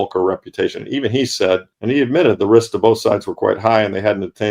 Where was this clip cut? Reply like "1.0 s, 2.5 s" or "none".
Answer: 1.7 s